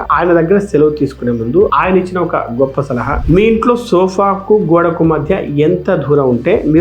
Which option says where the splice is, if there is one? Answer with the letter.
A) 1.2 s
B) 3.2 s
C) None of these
B